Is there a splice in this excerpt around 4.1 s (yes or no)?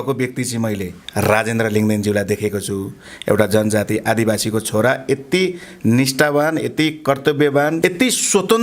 no